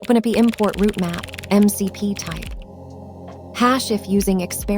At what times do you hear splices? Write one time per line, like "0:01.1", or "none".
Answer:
0:02.9

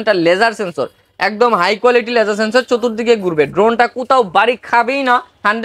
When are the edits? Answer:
none

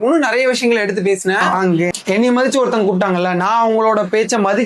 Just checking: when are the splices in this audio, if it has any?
0:01.9

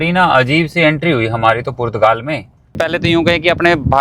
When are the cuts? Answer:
0:02.8

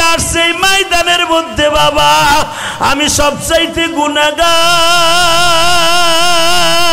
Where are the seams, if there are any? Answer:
none

